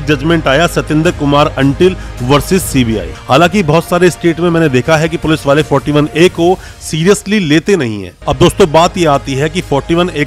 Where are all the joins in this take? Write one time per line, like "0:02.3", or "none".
0:03.1
0:08.2

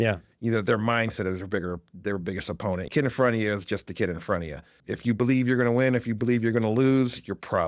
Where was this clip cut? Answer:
0:02.9
0:04.7

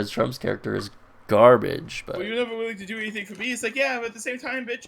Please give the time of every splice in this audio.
0:02.0

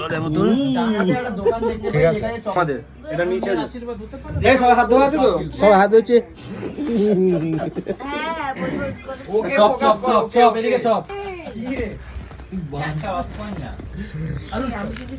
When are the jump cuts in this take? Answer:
none

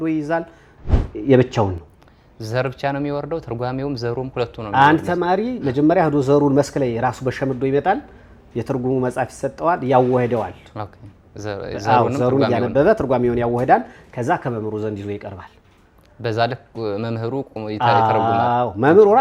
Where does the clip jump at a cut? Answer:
none

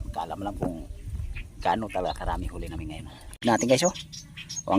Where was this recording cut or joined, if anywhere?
0:03.4

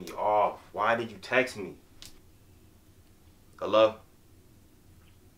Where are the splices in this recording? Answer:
0:02.2

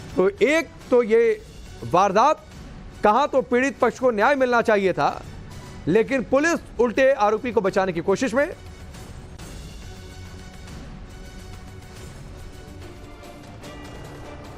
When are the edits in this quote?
0:08.8

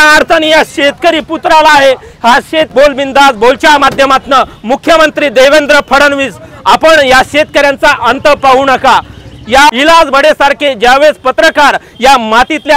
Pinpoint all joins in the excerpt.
0:02.7
0:09.7

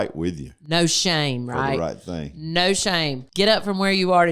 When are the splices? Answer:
0:03.2

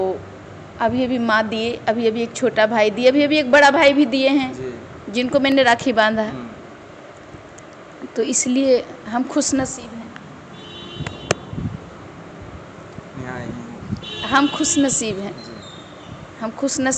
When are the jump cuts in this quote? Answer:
none

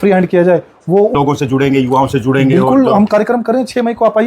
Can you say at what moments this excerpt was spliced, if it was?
0:01.1

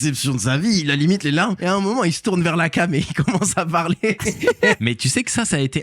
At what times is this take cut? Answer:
0:01.6
0:04.8

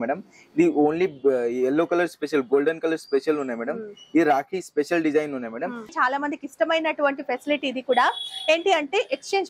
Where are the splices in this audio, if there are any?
0:05.9

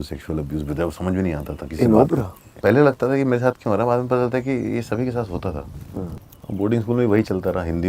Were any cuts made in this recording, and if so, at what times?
0:02.5
0:06.3

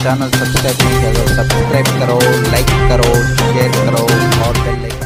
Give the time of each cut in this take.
none

